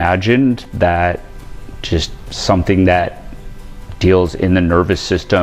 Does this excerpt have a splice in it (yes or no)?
no